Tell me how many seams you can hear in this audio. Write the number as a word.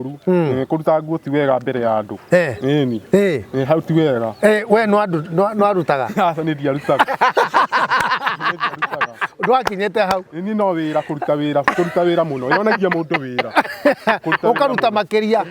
zero